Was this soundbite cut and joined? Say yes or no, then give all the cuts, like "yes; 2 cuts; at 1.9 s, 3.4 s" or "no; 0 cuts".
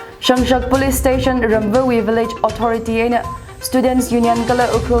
no; 0 cuts